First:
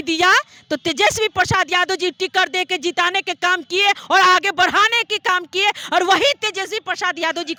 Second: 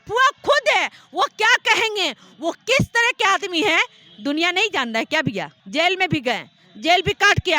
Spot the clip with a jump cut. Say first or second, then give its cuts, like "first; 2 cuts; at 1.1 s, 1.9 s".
second; 1 cut; at 5.5 s